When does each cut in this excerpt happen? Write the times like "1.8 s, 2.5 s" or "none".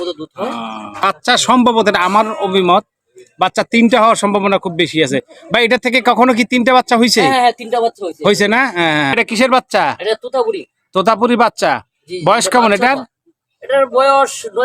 1.0 s, 9.1 s